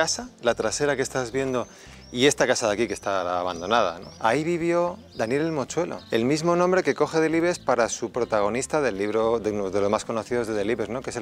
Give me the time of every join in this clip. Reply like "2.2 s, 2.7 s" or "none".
4.1 s, 6.0 s